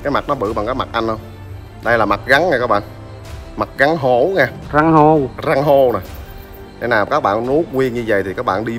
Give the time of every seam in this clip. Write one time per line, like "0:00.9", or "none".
none

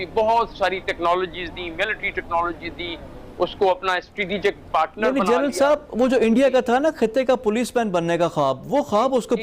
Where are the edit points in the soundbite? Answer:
none

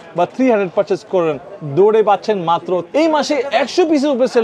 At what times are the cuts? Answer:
0:02.9

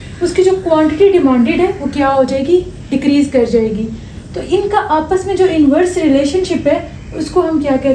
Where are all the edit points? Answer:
none

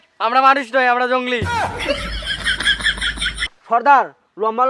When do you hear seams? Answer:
0:03.6

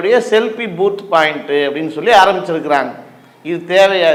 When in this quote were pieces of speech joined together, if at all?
none

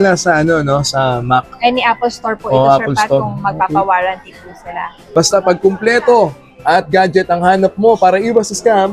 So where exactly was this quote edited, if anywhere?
0:04.9

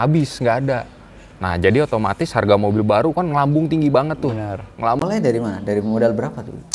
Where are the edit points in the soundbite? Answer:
0:05.1

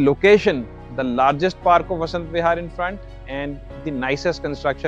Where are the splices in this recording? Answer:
none

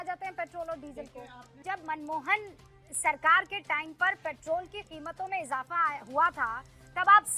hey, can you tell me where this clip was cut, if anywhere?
0:01.6

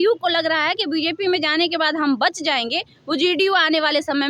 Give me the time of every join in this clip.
none

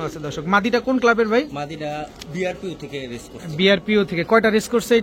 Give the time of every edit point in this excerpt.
none

